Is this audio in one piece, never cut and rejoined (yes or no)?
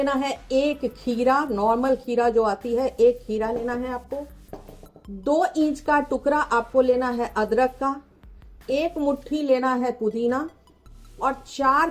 yes